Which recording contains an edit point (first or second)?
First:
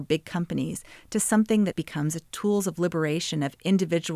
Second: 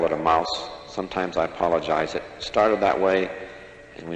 first